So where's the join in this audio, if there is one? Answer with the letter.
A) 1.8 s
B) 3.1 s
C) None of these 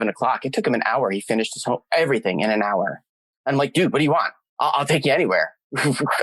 C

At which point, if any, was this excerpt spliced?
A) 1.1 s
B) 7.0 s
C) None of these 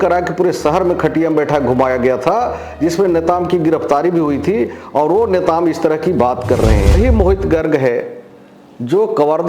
B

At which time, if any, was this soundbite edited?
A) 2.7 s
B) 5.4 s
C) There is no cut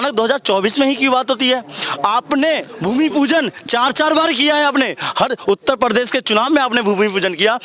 A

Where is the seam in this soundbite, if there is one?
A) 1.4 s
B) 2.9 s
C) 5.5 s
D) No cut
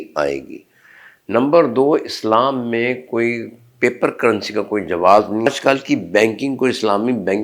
C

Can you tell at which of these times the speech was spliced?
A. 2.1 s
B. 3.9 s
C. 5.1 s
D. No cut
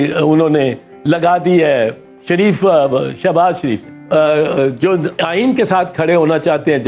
B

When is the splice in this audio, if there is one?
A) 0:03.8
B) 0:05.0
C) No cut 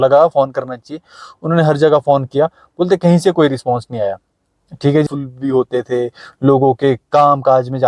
B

